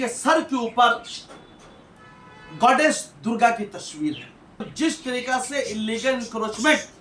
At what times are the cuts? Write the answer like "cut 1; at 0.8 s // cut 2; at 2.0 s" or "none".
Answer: cut 1; at 4.7 s